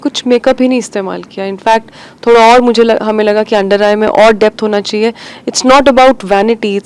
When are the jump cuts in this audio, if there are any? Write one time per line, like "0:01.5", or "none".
none

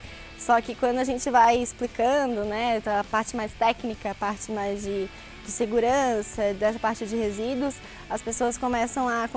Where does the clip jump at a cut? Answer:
none

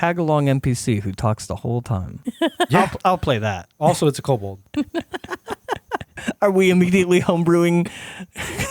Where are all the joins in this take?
0:02.1
0:03.6
0:04.6
0:06.1

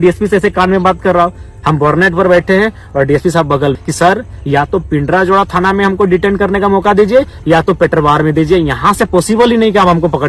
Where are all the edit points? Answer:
0:03.8

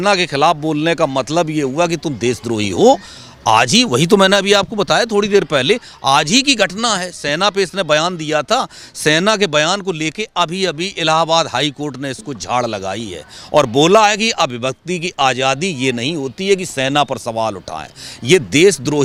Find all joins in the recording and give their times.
none

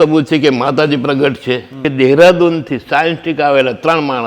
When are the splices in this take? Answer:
0:01.8

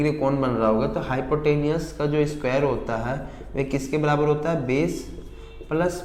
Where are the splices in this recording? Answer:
none

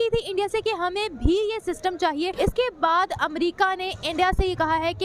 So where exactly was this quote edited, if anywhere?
0:02.3

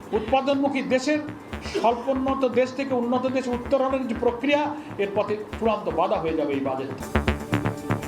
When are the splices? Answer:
0:07.0

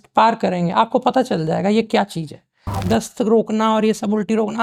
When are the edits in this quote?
0:02.8

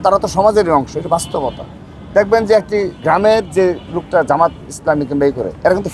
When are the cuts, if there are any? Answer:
none

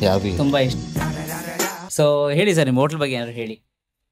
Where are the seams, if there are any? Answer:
0:01.8

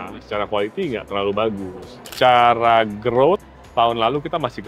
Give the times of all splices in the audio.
0:02.0

